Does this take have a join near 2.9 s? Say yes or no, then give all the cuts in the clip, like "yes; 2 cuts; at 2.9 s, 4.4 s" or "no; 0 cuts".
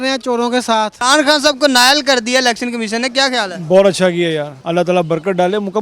no; 2 cuts; at 0.9 s, 4.6 s